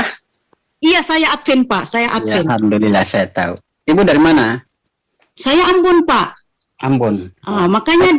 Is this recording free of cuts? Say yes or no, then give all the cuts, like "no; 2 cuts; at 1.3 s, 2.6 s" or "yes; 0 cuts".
yes; 0 cuts